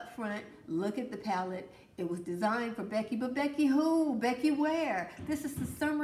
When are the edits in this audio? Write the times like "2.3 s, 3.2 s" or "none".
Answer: none